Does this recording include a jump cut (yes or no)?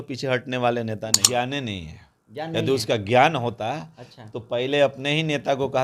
yes